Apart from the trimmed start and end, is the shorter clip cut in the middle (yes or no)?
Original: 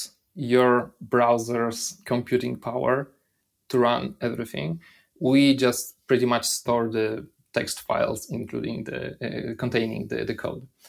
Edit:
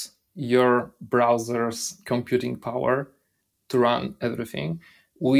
no